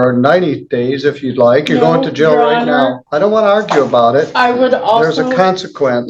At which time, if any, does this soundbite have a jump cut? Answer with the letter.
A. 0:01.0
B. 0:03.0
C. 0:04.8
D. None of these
B